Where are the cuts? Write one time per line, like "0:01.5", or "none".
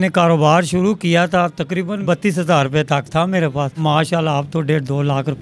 0:02.0
0:03.8